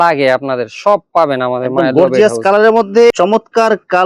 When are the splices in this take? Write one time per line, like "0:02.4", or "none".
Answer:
0:03.1